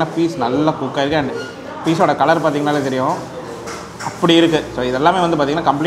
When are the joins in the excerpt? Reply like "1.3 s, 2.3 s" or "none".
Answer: none